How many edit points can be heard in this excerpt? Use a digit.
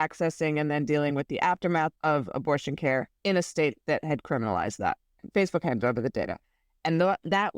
3